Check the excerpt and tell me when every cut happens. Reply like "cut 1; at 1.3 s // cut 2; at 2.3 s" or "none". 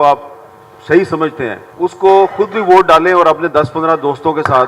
cut 1; at 1.6 s

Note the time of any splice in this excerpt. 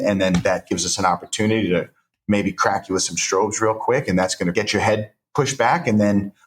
cut 1; at 4.5 s

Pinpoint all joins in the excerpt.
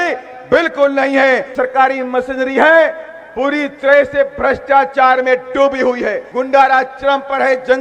cut 1; at 1.5 s // cut 2; at 6.3 s

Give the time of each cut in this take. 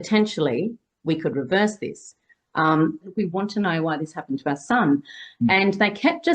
cut 1; at 3.1 s

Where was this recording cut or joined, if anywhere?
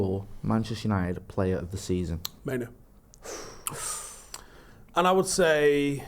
cut 1; at 2.3 s

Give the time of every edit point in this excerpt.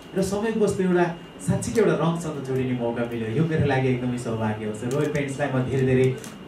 none

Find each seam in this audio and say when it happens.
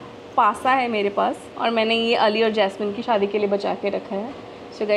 cut 1; at 1.5 s // cut 2; at 3.0 s

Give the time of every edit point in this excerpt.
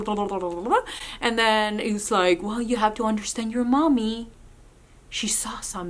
none

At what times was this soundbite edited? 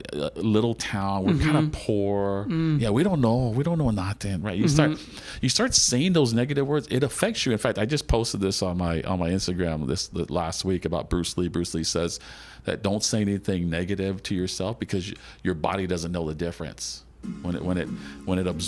none

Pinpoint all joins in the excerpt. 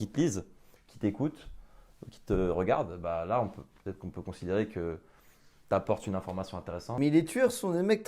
cut 1; at 6.8 s

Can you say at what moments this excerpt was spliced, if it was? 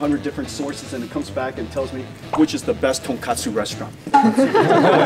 none

